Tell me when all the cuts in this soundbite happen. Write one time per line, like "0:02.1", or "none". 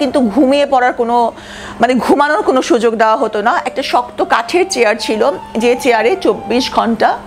none